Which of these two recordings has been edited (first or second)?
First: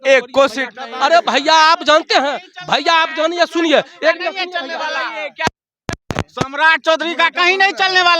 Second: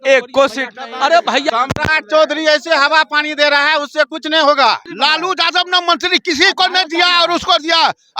second